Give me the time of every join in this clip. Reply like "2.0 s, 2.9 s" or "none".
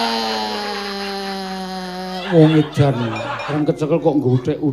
3.5 s